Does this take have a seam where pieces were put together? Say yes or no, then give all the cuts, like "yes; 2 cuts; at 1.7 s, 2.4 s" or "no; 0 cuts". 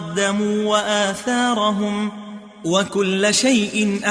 no; 0 cuts